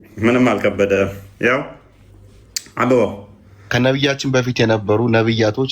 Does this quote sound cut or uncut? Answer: cut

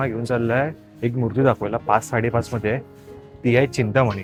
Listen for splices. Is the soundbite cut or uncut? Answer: uncut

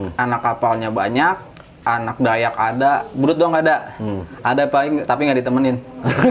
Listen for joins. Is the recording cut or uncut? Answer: uncut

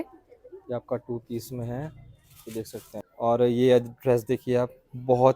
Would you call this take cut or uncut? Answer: cut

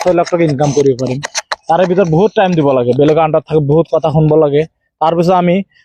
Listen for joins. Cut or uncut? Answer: uncut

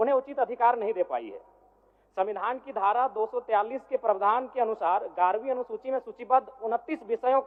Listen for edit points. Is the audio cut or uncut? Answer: uncut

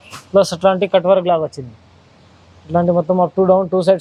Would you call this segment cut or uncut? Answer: uncut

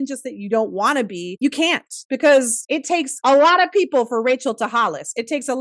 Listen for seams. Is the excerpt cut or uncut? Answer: uncut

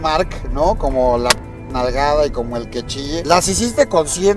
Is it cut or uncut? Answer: cut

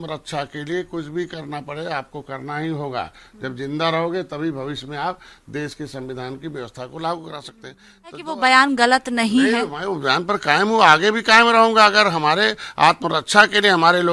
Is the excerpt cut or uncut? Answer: cut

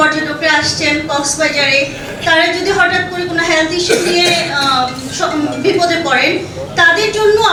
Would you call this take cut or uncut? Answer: uncut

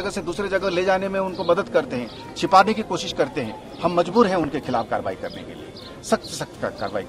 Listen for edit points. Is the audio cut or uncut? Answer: uncut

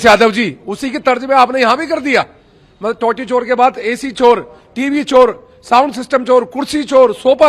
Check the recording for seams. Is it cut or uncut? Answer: uncut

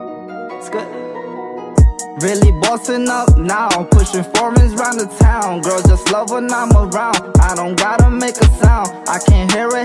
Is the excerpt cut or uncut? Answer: uncut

